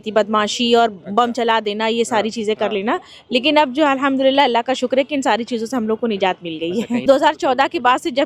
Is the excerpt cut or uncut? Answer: cut